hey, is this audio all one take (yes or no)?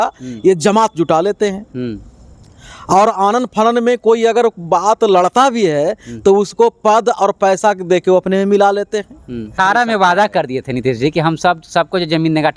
no